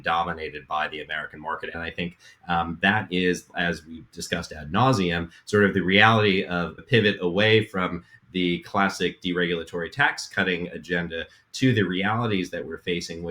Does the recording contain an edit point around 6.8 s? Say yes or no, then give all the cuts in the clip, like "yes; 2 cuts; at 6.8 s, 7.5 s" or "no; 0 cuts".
yes; 2 cuts; at 1.7 s, 6.8 s